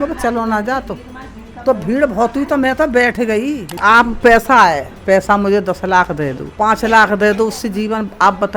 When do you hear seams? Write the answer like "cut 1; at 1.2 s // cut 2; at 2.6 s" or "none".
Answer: cut 1; at 3.8 s // cut 2; at 6.4 s